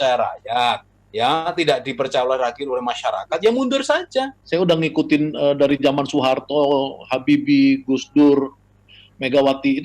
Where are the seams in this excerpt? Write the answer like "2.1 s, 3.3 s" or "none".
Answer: 4.4 s